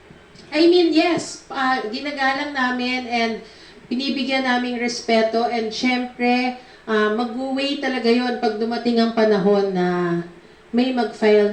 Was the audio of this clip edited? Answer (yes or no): no